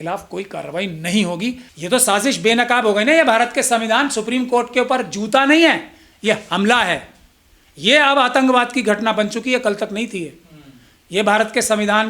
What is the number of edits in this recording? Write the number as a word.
one